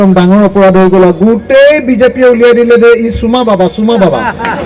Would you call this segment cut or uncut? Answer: uncut